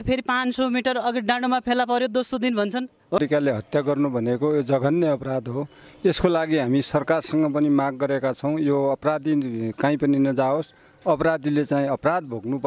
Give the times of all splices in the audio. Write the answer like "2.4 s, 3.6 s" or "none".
3.2 s